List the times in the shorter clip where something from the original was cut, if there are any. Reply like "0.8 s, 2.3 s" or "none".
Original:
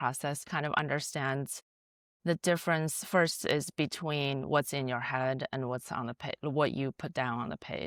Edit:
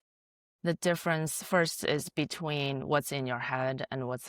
none